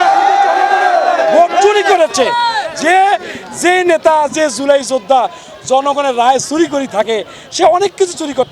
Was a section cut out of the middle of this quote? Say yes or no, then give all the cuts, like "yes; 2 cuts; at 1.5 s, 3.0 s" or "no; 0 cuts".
no; 0 cuts